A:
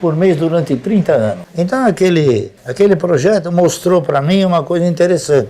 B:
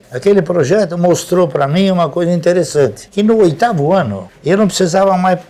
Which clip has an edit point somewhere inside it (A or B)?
A